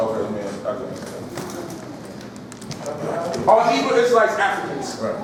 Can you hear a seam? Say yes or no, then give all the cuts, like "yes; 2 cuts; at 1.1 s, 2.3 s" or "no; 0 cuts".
no; 0 cuts